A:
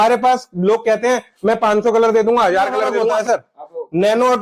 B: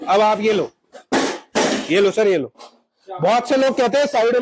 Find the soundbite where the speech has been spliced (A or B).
A